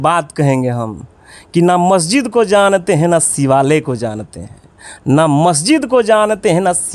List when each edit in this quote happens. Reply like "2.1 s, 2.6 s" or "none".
none